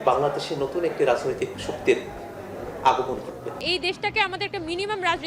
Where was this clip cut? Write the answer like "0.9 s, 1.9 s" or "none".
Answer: 3.6 s